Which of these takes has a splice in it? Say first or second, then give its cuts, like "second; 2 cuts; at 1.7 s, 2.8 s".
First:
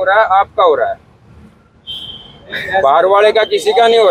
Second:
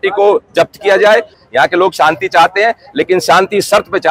second; 1 cut; at 1.3 s